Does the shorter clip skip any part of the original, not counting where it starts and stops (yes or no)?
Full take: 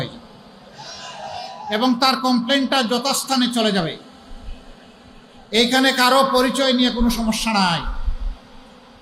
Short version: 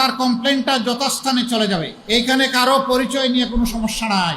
yes